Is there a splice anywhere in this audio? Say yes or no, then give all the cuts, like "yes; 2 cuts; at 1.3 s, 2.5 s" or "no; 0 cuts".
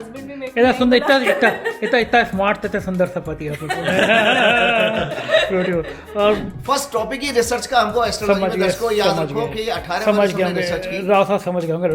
yes; 1 cut; at 6.4 s